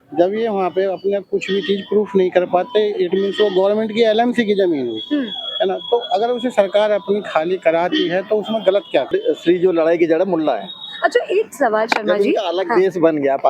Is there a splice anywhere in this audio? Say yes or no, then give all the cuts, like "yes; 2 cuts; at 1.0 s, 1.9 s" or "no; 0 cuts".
yes; 1 cut; at 9.1 s